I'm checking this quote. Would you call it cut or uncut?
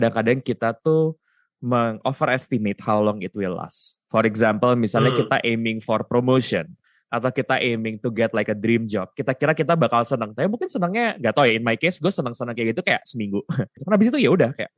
cut